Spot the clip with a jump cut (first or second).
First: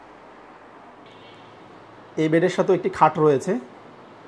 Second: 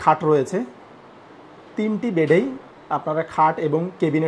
first